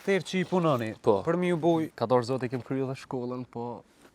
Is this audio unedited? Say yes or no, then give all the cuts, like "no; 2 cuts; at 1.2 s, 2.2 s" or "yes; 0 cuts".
no; 1 cut; at 1.9 s